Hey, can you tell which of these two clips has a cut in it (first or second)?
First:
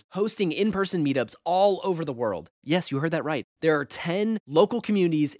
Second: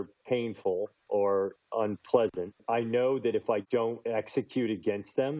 second